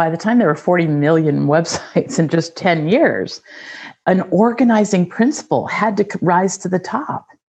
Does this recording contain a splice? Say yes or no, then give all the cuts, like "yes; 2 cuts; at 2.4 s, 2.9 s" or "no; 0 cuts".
yes; 1 cut; at 4.0 s